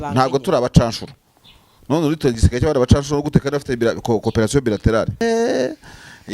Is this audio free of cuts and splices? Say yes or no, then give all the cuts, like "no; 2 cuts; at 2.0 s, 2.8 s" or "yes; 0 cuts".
no; 1 cut; at 5.2 s